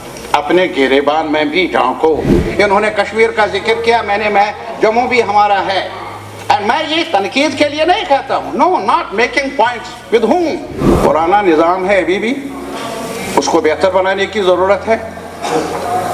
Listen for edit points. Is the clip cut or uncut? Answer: cut